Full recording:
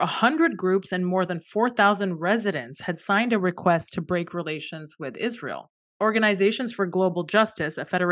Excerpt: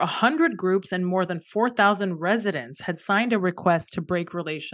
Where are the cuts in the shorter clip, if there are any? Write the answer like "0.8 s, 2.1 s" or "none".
none